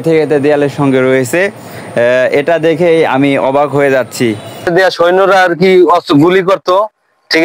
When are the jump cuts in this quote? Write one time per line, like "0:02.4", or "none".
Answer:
0:04.7

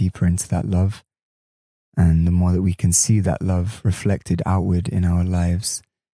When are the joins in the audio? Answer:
none

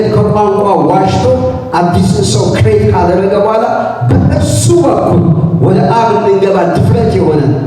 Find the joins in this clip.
none

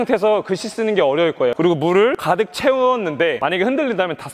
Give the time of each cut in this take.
0:01.5
0:02.2
0:03.4

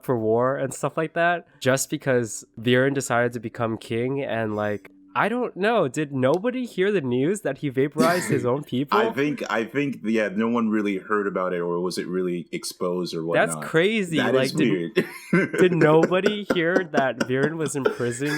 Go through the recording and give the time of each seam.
0:01.5
0:02.4
0:04.9

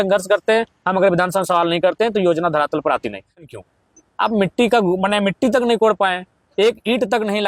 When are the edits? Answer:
0:03.4

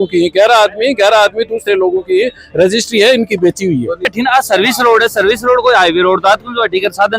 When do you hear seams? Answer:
0:04.1

